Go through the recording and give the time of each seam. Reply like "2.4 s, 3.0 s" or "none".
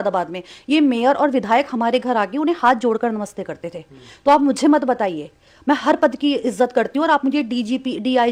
none